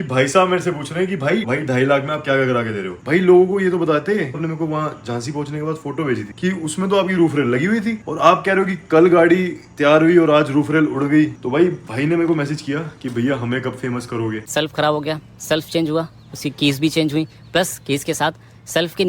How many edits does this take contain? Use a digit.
6